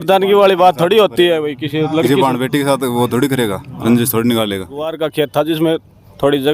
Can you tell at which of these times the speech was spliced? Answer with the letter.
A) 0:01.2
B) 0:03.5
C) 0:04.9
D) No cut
C